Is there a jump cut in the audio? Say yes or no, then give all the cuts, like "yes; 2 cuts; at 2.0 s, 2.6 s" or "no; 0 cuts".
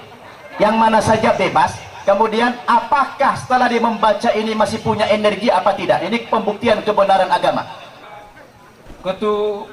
yes; 1 cut; at 8.0 s